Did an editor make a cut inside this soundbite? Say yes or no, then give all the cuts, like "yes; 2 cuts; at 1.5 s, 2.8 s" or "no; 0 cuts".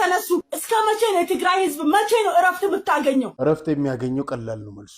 yes; 1 cut; at 3.3 s